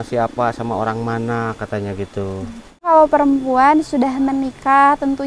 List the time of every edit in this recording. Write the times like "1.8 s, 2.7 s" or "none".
2.8 s